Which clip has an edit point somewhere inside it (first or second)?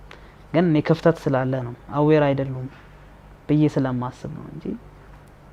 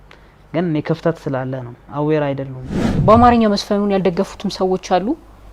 second